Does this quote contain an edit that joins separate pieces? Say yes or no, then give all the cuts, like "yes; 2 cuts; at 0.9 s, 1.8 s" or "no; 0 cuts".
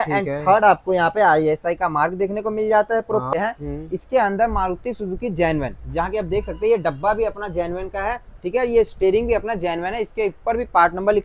yes; 1 cut; at 3.3 s